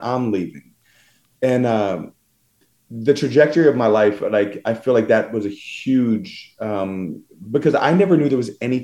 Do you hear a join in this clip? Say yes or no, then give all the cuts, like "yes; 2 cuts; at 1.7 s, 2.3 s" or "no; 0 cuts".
no; 0 cuts